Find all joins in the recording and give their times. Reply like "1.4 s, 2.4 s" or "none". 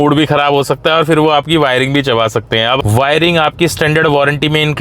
2.8 s